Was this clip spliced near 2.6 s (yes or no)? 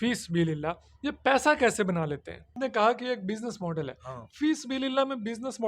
yes